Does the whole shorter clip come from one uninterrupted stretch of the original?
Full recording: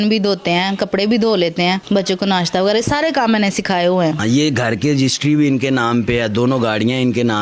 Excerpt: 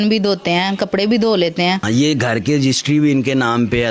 no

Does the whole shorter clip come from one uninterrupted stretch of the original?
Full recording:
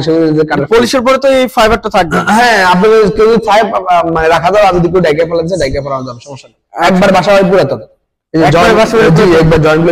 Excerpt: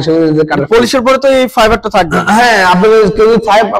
yes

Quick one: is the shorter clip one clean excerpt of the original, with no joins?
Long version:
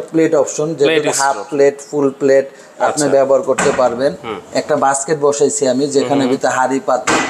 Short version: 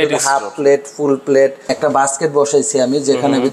no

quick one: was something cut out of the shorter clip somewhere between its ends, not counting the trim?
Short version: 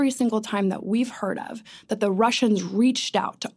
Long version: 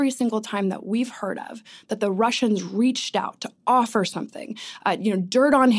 no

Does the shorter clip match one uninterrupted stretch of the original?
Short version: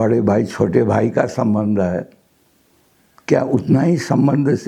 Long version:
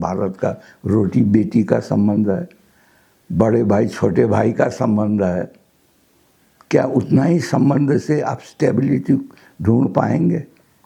yes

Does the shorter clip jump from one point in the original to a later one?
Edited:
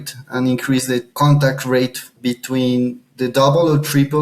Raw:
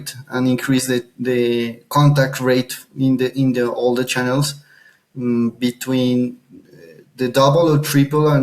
yes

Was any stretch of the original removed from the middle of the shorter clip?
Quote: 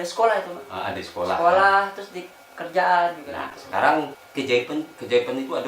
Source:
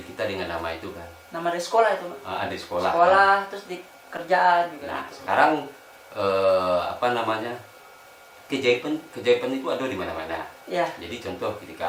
yes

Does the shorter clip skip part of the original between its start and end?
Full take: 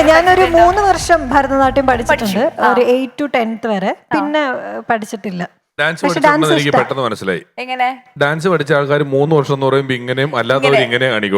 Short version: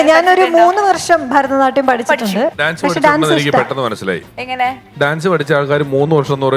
yes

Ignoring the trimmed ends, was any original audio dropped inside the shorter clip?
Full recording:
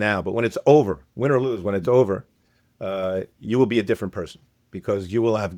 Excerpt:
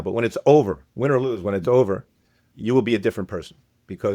yes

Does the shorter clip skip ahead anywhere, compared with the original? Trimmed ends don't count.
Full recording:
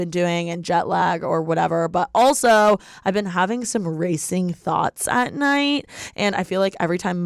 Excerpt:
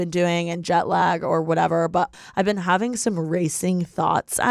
yes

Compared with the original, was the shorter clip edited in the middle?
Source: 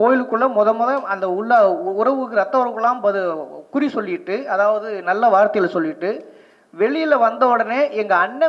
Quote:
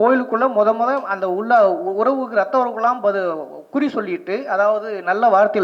no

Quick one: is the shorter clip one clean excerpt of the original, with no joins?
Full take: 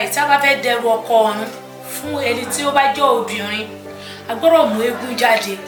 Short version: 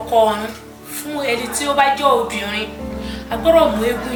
yes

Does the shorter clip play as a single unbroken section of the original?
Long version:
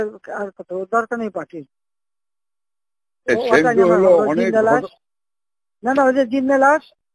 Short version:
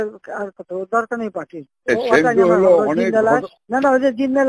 no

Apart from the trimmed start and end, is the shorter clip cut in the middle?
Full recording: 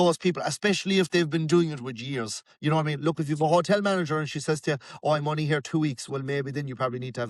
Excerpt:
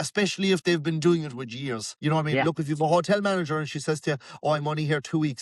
yes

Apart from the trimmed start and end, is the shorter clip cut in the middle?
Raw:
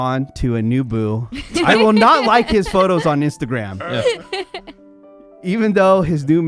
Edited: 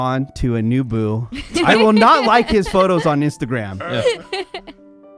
no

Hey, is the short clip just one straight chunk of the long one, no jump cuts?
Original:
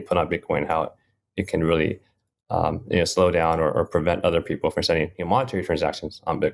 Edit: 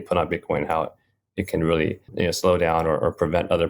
no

